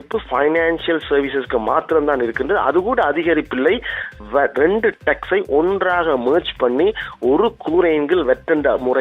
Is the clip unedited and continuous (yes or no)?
yes